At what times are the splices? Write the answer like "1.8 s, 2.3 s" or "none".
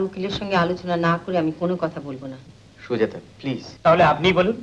3.7 s